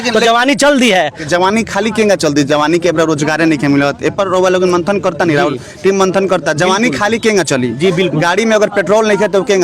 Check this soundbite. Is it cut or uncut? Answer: cut